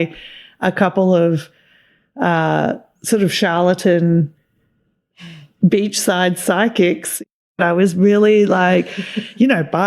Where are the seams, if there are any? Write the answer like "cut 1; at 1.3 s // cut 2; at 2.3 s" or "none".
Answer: cut 1; at 7.4 s